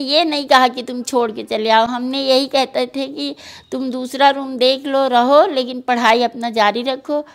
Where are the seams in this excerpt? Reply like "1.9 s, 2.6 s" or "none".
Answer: none